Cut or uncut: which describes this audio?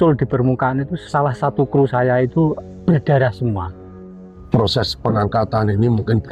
cut